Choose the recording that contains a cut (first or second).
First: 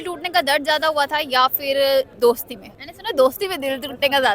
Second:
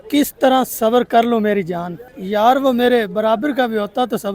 first